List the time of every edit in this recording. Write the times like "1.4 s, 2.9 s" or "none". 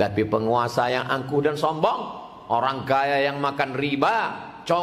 none